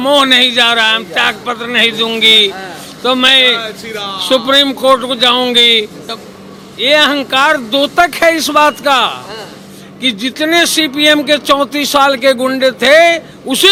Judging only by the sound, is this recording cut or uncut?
uncut